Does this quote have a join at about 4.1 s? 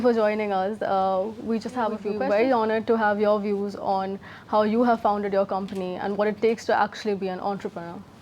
no; 1 cut; at 2.1 s

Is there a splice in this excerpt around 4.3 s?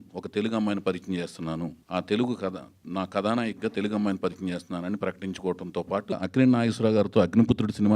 no; 2 cuts; at 1.8 s, 6.2 s

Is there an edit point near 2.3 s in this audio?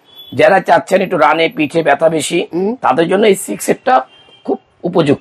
no; 0 cuts

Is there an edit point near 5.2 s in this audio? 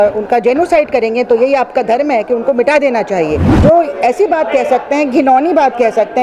no; 1 cut; at 3.5 s

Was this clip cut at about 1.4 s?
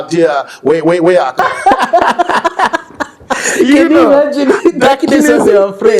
yes; 1 cut; at 1.4 s

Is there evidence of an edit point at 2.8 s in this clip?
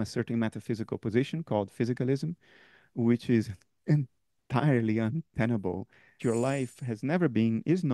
no; 1 cut; at 6.1 s

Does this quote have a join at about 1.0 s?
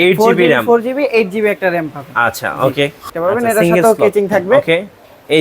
no; 1 cut; at 3.1 s

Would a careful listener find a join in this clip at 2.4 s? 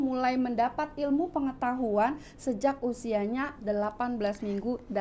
no; 0 cuts

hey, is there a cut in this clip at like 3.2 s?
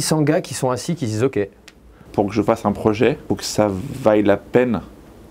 yes; 2 cuts; at 2.1 s, 3.2 s

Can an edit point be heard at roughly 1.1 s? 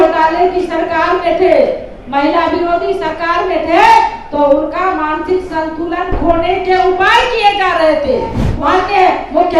no; 1 cut; at 8.5 s

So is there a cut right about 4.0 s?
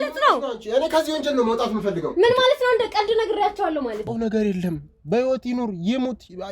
yes; 1 cut; at 4.0 s

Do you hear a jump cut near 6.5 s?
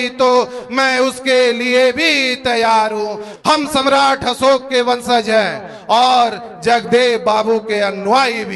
no; 1 cut; at 3.2 s

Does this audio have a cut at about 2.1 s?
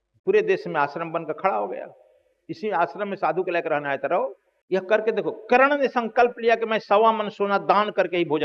no; 1 cut; at 4.5 s

